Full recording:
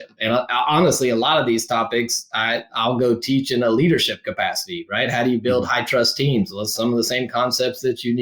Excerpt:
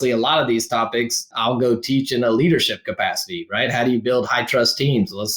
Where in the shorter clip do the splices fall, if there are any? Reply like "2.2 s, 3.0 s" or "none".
1.3 s